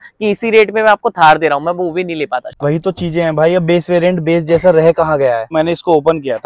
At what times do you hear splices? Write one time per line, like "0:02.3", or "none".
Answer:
0:02.5
0:05.5

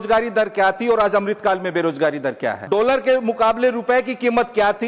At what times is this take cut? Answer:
0:02.6

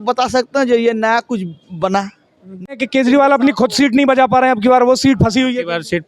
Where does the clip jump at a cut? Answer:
0:02.7

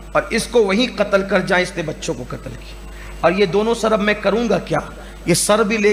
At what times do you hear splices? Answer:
none

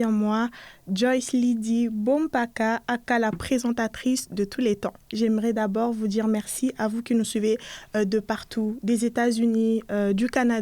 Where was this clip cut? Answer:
0:05.1

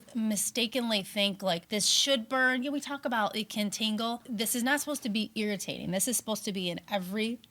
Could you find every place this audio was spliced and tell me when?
0:01.6
0:04.2

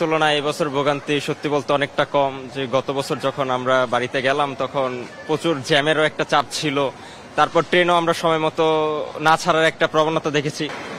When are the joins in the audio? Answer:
none

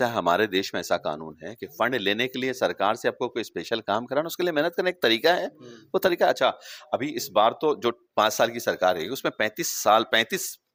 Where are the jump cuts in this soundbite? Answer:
none

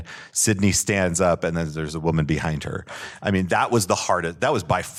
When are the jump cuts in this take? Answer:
none

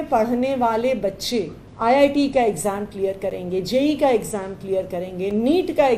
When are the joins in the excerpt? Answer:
0:01.6

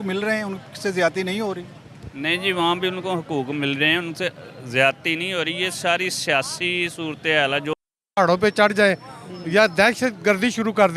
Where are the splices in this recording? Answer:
0:08.1

